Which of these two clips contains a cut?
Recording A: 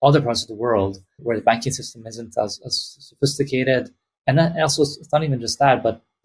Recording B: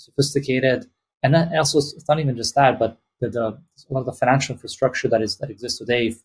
A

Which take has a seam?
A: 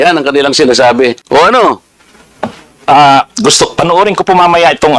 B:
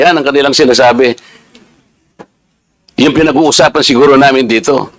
A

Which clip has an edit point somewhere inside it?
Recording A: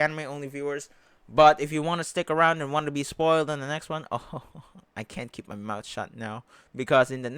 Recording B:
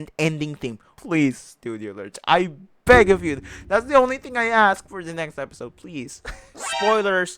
B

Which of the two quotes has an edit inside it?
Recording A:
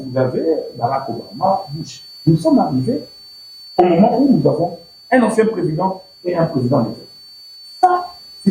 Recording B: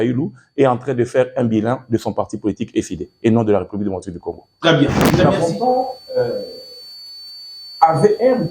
B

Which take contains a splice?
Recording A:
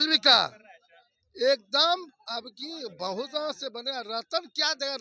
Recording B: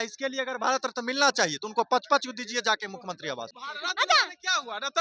B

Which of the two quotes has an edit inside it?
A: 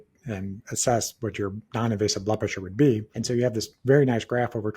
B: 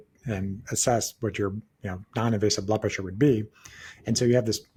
A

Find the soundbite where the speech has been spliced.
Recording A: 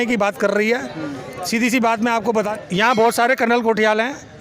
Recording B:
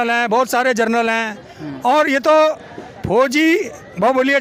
A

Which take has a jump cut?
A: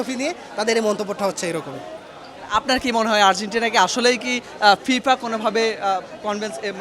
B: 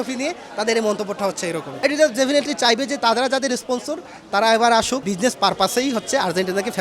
B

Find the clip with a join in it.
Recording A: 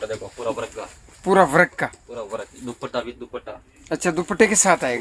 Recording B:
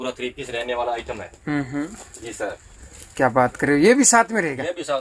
B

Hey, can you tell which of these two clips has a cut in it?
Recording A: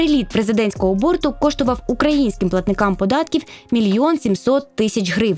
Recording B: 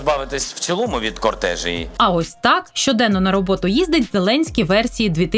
B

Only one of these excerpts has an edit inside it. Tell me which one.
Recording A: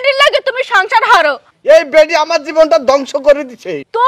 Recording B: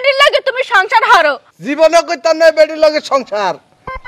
A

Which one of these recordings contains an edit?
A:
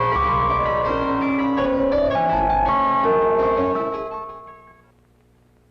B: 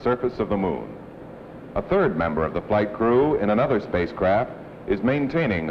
A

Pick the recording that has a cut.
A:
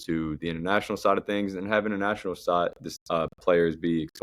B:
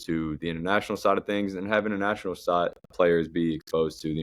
B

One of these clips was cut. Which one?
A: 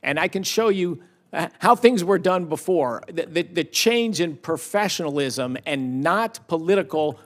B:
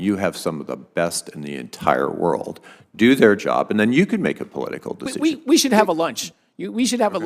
B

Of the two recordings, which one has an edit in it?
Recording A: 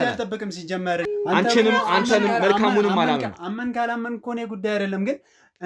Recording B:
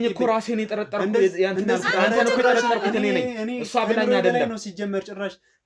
A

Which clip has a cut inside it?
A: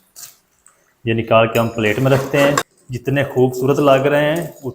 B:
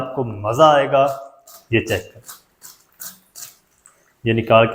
A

